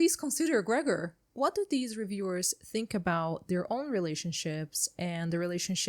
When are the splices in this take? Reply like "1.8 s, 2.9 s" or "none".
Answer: 1.2 s

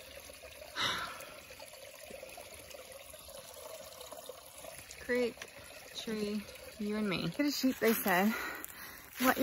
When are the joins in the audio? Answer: 7.4 s

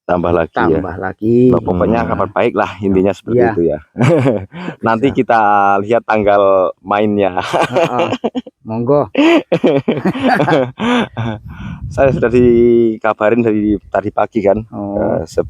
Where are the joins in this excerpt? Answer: 2.3 s

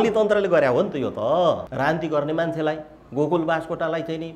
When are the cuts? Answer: 1.6 s

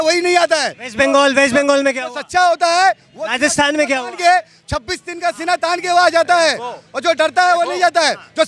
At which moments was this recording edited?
none

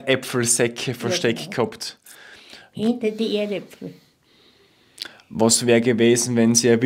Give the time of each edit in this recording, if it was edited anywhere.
none

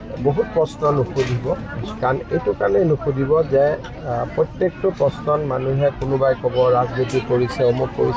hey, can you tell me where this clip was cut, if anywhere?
none

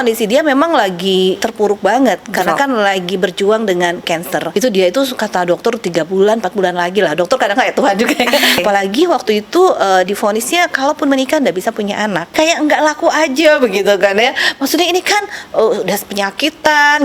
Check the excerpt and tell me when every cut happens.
1.4 s, 4.5 s, 8.6 s, 12.3 s

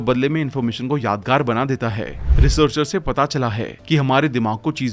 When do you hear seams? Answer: 2.1 s

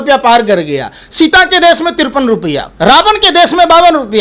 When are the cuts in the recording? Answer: 2.7 s

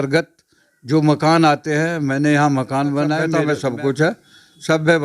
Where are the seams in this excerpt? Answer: 3.3 s

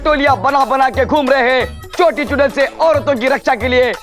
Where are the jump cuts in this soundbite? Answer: none

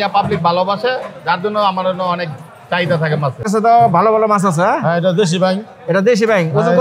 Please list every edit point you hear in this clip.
3.4 s

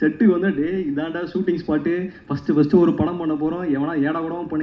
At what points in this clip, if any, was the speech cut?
none

